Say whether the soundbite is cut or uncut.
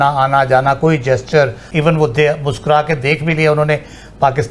cut